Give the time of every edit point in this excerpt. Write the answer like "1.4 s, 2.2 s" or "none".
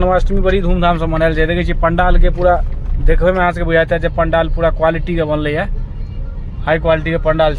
none